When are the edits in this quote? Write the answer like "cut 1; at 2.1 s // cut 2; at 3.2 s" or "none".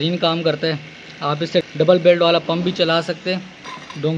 cut 1; at 1.7 s